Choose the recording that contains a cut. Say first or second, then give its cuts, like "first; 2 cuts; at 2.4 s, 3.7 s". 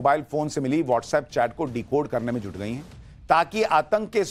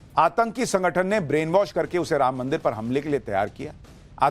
second; 1 cut; at 1.9 s